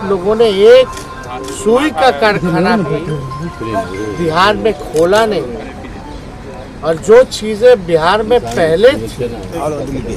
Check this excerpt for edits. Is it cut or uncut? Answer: uncut